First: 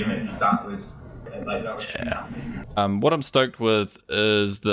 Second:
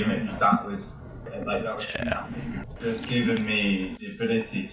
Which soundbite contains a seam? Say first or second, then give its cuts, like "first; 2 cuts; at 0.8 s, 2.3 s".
second; 1 cut; at 2.7 s